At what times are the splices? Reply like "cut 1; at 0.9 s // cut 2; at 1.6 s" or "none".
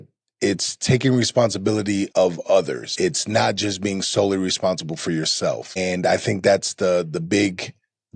cut 1; at 2.1 s // cut 2; at 2.9 s // cut 3; at 5.8 s